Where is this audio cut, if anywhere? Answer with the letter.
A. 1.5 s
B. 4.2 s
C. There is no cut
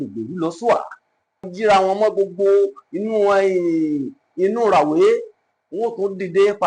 A